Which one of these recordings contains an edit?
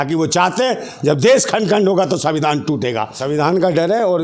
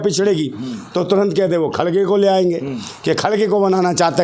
first; 1 cut; at 3.1 s

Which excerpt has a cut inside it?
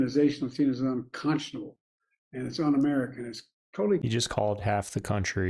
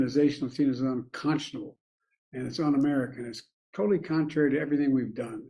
first; 1 cut; at 4.0 s

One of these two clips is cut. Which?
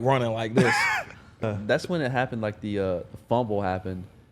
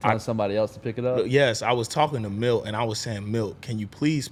first; 1 cut; at 1.4 s

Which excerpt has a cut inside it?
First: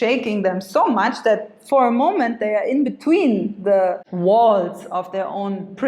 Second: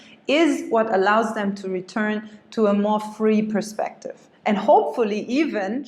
first; 1 cut; at 4.1 s

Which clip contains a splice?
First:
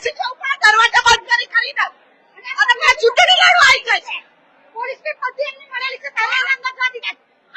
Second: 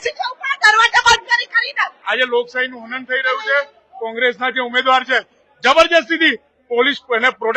second; 1 cut; at 1.9 s

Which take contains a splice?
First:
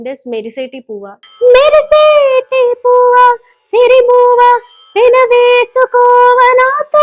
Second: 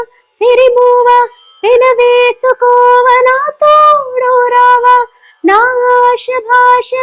first; 1 cut; at 1.2 s

